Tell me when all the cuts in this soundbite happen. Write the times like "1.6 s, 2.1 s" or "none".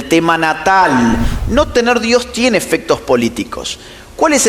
1.3 s